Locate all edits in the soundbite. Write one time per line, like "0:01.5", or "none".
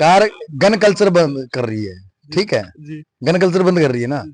none